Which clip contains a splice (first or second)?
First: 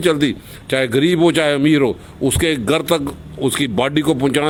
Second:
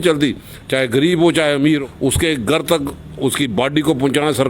second